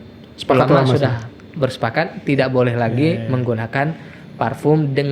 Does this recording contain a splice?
no; 0 cuts

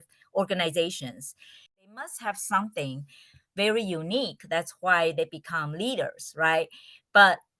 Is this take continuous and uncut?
no; 1 cut; at 1.9 s

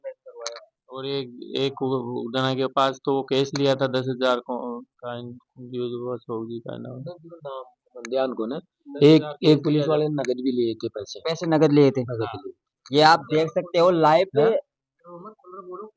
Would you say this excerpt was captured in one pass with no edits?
yes; 0 cuts

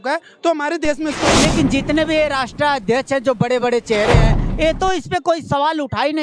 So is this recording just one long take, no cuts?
no; 1 cut; at 1.2 s

